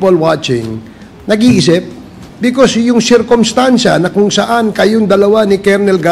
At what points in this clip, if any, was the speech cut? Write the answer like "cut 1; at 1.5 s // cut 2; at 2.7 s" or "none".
cut 1; at 2.2 s